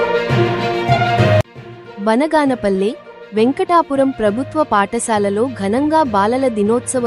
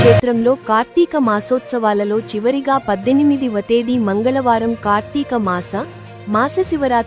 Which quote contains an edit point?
first; 1 cut; at 1.2 s

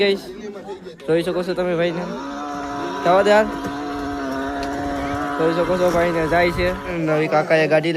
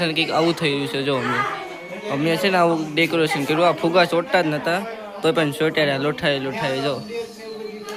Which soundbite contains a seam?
first; 1 cut; at 6.9 s

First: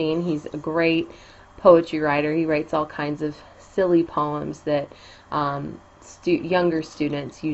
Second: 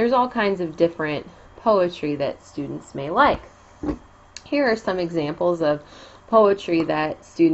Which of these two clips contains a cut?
second; 1 cut; at 3.0 s

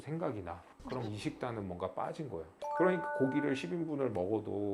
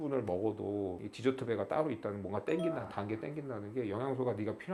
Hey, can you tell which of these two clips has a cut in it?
first; 1 cut; at 2.6 s

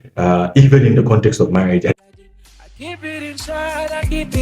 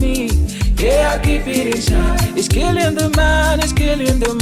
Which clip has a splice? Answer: first; 1 cut; at 1.9 s

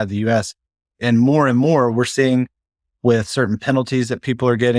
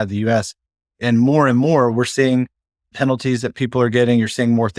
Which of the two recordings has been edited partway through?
second; 1 cut; at 2.9 s

